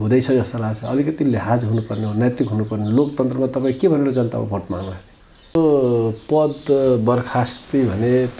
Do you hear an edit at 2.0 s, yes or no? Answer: no